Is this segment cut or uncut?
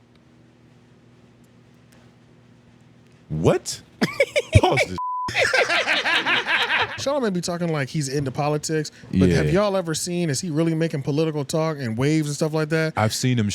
cut